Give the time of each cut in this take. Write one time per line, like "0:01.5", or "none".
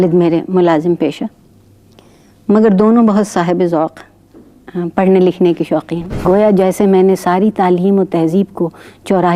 0:06.2

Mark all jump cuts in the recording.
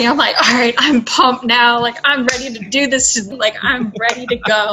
0:03.3

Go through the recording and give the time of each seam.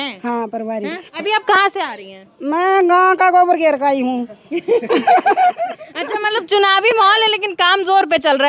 0:01.1

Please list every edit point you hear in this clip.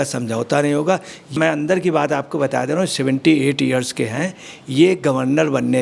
0:01.2

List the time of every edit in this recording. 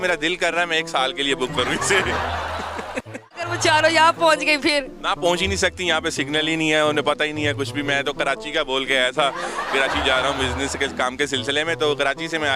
0:03.6

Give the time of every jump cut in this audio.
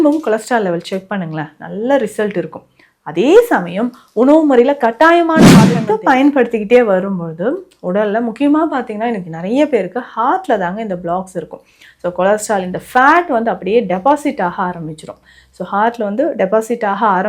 0:05.8

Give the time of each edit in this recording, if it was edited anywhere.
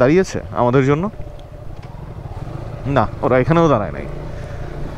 none

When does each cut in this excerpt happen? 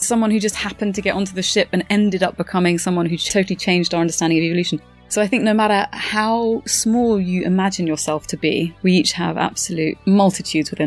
0:08.7
0:10.0

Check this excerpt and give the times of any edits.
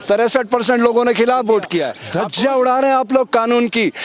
0:02.0

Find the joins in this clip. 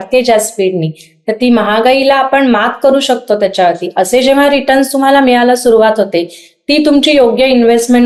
none

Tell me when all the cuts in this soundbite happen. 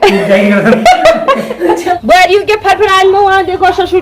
0:02.0

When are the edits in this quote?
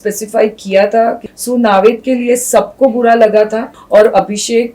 0:01.3
0:03.7

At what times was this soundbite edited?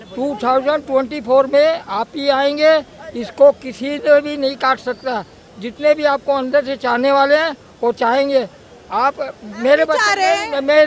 none

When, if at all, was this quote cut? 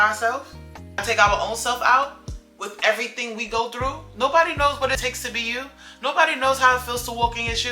0:05.0

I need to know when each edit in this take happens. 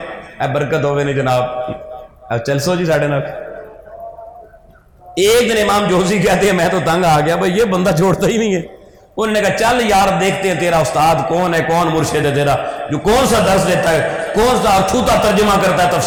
none

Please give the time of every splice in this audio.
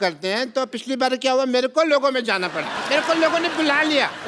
0:02.7

